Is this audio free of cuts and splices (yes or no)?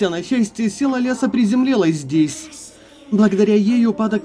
yes